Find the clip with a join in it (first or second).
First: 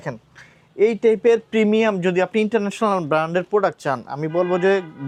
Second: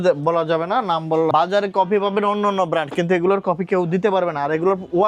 second